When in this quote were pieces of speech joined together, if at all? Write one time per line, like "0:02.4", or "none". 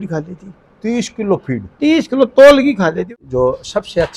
0:03.1